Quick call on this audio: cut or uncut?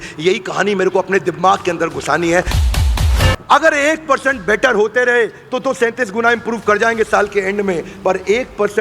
cut